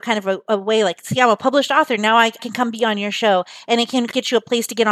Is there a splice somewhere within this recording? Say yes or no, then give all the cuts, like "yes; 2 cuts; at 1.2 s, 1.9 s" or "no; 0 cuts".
yes; 2 cuts; at 2.4 s, 4.1 s